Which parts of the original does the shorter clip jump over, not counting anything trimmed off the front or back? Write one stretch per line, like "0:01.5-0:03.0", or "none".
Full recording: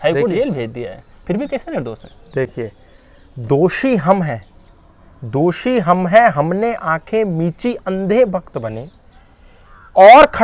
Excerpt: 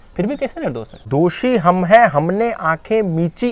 0:02.0-0:05.1